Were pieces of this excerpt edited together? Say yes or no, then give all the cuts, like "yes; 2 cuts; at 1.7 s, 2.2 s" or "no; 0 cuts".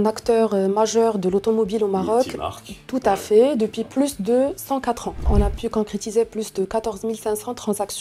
yes; 1 cut; at 5.3 s